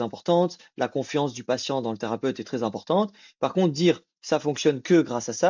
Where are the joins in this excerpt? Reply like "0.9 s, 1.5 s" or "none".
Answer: none